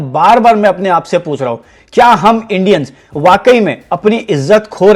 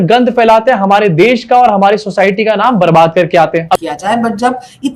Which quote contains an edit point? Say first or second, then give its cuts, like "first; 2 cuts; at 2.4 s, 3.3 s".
second; 1 cut; at 3.8 s